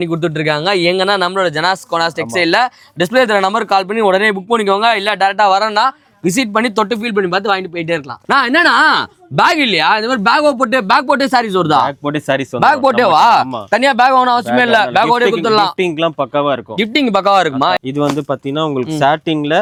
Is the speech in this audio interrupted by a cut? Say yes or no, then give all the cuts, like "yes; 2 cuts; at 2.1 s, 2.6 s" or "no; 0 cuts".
no; 0 cuts